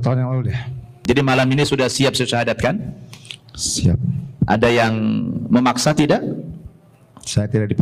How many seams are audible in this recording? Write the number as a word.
one